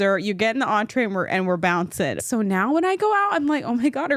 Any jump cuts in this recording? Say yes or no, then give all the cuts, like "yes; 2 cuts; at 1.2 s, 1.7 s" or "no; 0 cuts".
yes; 1 cut; at 2.2 s